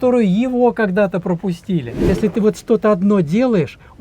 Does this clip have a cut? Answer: yes; 1 cut; at 2.1 s

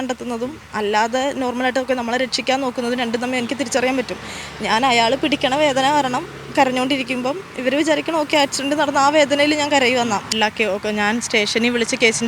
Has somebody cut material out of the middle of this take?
yes; 1 cut; at 10.3 s

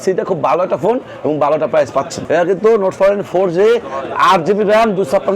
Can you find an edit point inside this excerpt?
yes; 1 cut; at 2.2 s

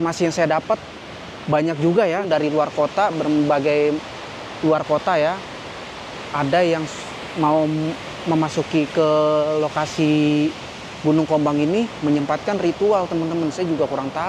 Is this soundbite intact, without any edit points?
no; 1 cut; at 2.3 s

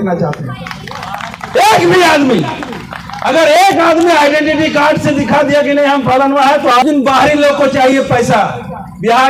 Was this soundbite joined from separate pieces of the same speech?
yes; 1 cut; at 6.8 s

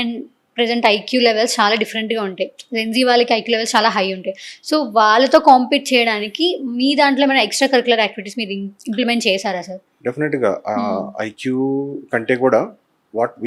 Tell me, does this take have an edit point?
no; 0 cuts

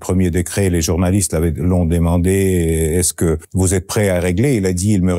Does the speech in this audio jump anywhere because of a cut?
yes; 1 cut; at 3.5 s

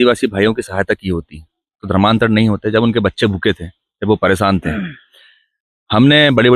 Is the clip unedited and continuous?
yes; 0 cuts

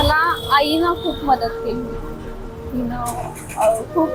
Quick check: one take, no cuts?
yes; 0 cuts

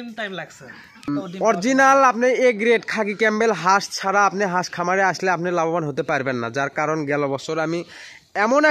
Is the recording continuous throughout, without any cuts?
no; 1 cut; at 1.1 s

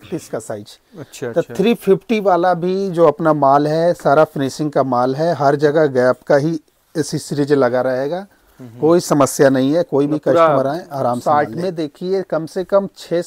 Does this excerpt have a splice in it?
yes; 1 cut; at 11.2 s

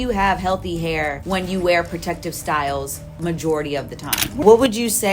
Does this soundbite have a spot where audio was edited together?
yes; 2 cuts; at 1.2 s, 4.4 s

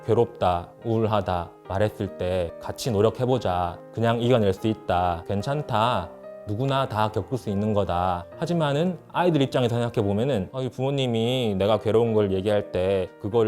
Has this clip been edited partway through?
yes; 3 cuts; at 2.6 s, 8.3 s, 10.5 s

